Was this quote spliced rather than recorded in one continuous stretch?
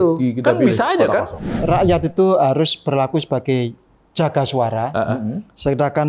yes; 1 cut; at 1.5 s

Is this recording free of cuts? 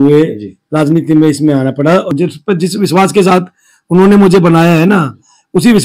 no; 1 cut; at 2.1 s

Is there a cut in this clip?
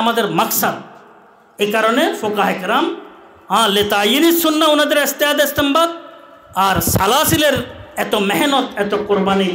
no; 0 cuts

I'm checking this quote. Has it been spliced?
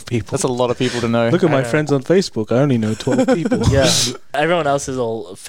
yes; 1 cut; at 4.3 s

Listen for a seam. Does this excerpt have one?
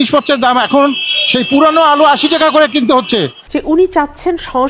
yes; 1 cut; at 3.4 s

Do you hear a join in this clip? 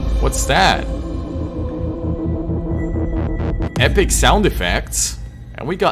no; 0 cuts

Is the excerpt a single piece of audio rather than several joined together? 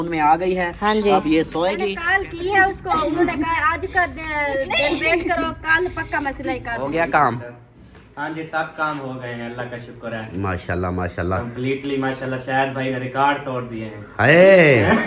no; 2 cuts; at 2.0 s, 6.8 s

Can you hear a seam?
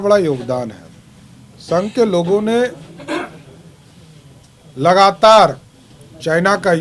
no; 0 cuts

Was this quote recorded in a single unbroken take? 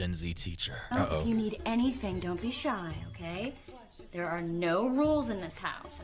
yes; 0 cuts

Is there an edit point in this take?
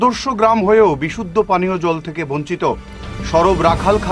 no; 0 cuts

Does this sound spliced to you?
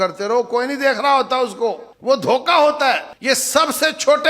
yes; 2 cuts; at 1.9 s, 3.1 s

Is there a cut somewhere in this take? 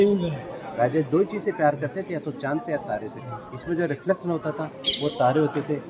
no; 0 cuts

